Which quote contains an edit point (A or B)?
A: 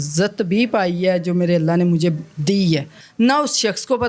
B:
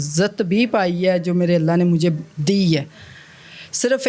A